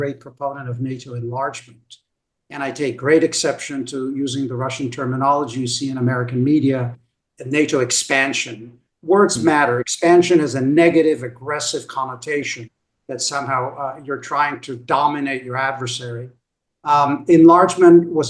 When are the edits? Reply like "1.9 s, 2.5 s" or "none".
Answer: none

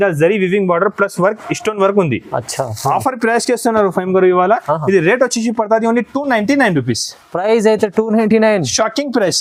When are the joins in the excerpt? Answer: none

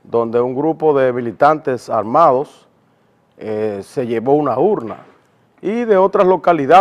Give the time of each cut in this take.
3.9 s

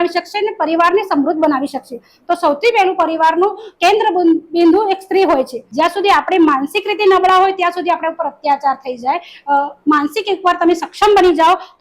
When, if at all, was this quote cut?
5.6 s

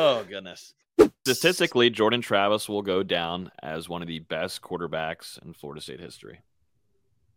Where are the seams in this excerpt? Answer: 1.1 s

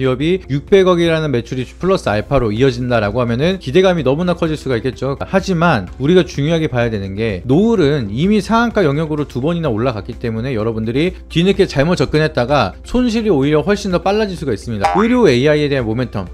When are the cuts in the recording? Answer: 5.2 s, 14.8 s

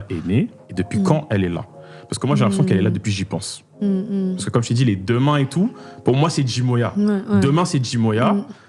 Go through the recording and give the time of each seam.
none

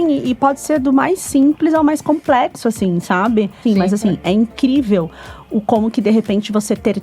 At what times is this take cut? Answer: 3.6 s

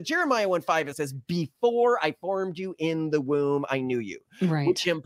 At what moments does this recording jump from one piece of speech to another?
0.9 s

